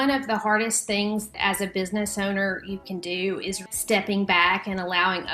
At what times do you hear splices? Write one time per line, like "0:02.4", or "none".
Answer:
0:01.3
0:03.6